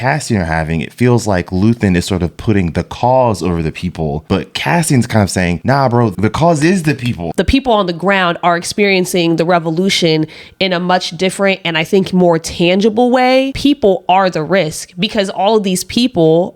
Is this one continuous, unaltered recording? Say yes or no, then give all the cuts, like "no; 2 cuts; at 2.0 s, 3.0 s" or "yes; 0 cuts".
no; 4 cuts; at 4.2 s, 6.1 s, 7.3 s, 13.5 s